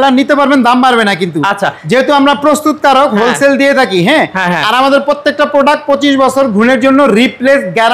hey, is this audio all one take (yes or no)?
yes